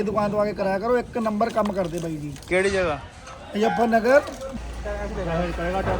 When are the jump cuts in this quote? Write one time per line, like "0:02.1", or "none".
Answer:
0:04.4